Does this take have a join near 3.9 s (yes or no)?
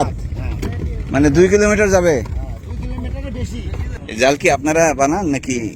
yes